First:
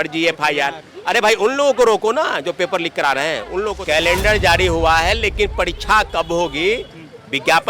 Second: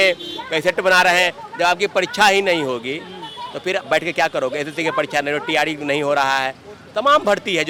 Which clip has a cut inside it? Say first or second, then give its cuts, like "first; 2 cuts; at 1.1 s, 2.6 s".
first; 1 cut; at 3.7 s